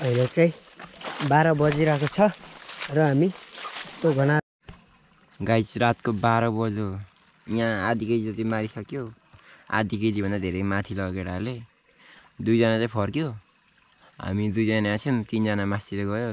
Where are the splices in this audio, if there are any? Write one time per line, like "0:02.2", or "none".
0:04.4